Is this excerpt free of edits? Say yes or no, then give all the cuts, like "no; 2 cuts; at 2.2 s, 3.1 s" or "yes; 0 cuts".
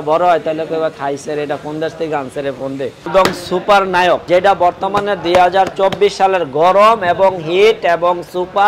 no; 2 cuts; at 3.1 s, 4.2 s